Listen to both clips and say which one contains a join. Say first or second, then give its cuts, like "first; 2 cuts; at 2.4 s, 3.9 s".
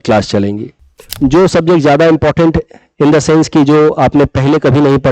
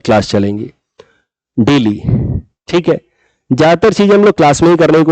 first; 1 cut; at 1.1 s